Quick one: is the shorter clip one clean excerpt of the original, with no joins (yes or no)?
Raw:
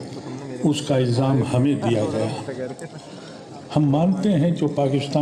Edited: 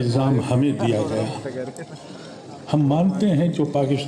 yes